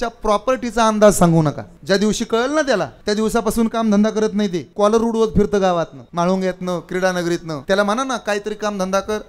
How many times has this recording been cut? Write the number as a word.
five